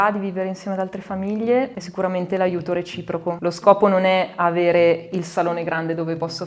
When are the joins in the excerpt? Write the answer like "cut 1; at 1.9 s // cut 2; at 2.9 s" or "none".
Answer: cut 1; at 1.8 s // cut 2; at 3.4 s

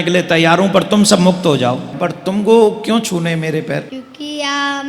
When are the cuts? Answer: cut 1; at 1.9 s // cut 2; at 4.0 s

